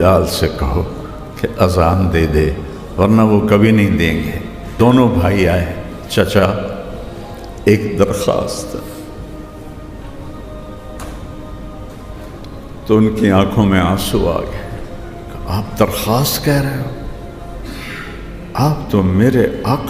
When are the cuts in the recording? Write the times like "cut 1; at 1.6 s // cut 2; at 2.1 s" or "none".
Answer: cut 1; at 4.8 s